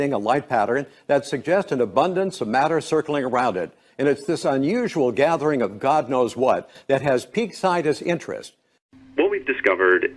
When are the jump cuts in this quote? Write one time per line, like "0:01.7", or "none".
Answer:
none